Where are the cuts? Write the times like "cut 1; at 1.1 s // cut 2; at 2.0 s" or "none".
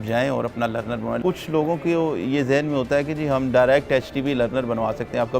cut 1; at 1.2 s